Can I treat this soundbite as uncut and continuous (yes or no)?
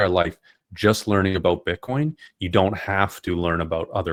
yes